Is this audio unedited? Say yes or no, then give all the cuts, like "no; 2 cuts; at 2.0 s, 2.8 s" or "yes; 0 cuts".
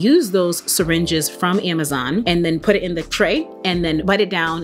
yes; 0 cuts